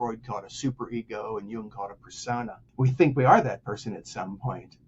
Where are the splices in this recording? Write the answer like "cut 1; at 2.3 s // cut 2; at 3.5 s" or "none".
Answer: cut 1; at 2.6 s